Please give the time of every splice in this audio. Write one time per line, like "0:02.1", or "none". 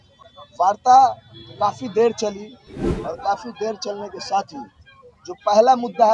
none